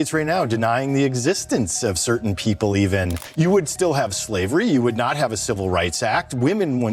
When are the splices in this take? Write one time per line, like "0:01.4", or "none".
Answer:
0:03.2